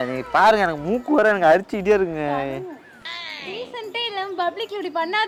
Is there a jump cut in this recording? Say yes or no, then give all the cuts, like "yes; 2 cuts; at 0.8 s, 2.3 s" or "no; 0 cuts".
no; 0 cuts